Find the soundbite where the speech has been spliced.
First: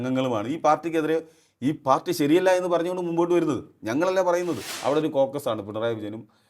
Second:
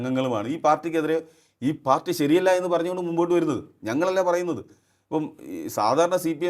first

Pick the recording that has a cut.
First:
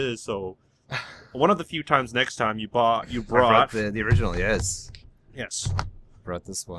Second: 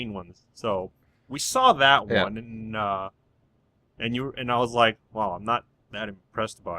second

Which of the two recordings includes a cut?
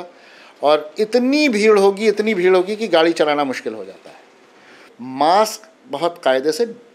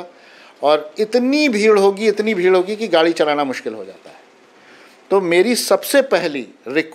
first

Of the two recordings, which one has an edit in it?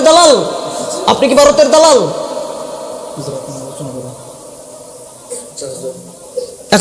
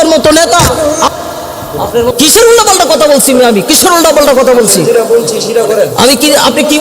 second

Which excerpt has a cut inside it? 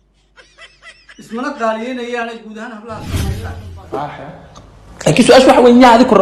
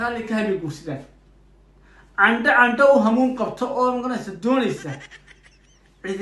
first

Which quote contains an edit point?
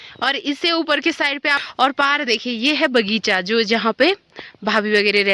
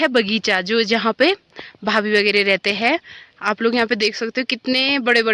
first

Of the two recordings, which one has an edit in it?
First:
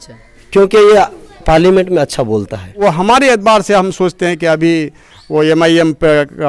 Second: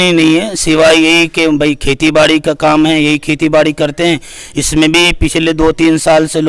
first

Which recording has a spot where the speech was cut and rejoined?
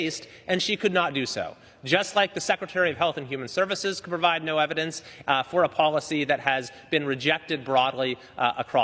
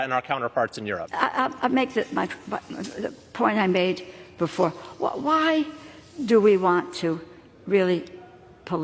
second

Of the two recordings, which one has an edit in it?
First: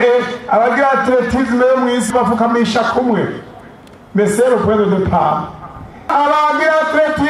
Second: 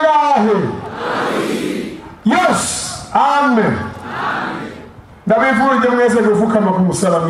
first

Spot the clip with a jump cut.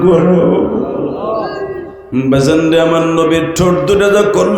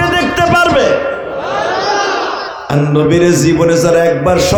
first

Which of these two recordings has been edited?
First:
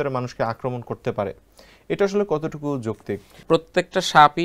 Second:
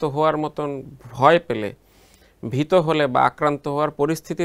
first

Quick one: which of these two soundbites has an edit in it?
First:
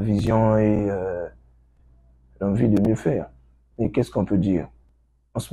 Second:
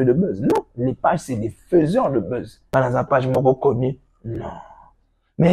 second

